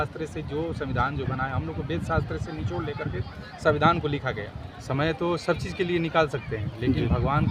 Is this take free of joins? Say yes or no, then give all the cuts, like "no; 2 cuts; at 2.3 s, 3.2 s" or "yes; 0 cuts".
no; 1 cut; at 4.5 s